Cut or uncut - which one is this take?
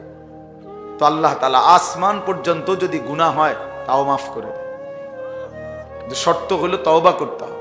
uncut